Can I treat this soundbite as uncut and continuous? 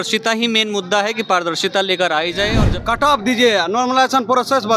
no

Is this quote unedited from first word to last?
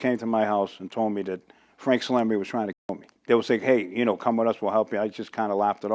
yes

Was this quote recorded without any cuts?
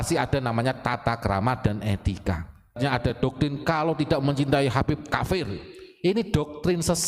no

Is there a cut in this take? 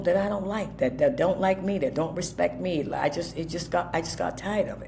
no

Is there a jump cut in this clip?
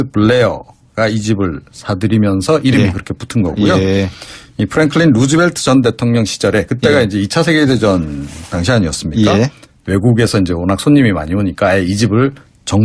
no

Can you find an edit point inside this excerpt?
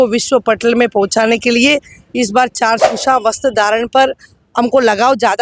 yes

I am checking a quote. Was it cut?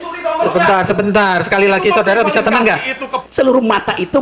yes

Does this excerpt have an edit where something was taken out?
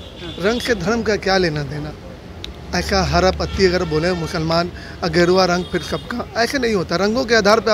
no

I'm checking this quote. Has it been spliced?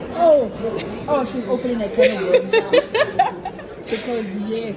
no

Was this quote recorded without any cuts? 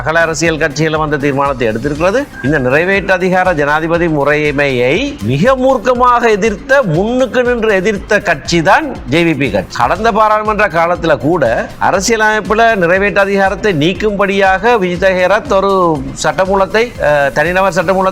no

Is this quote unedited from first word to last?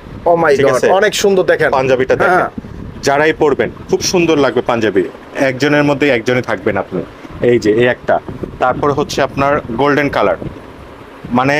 yes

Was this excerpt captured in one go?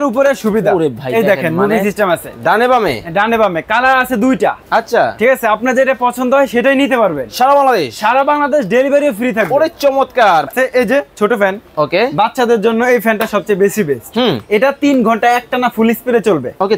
no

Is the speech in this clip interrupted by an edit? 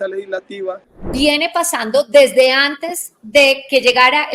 yes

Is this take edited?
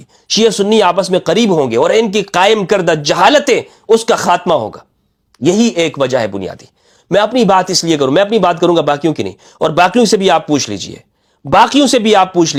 no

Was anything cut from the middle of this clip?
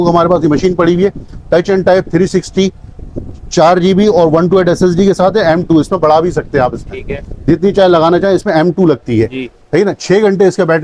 no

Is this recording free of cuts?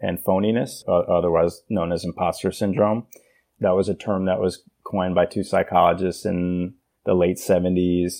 no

